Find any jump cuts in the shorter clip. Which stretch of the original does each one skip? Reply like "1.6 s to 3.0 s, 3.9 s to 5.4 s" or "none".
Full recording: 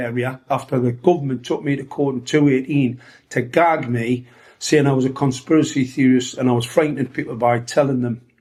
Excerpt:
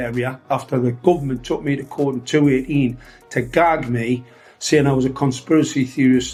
none